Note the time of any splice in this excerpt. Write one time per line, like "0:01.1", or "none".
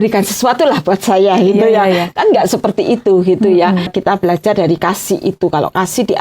0:03.9